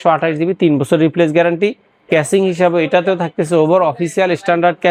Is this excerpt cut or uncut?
uncut